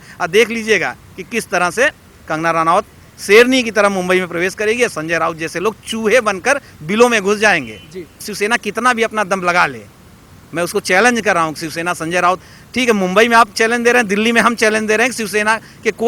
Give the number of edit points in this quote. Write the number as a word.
zero